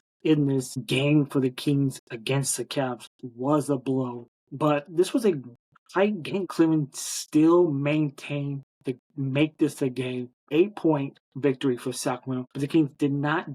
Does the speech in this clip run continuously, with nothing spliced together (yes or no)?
no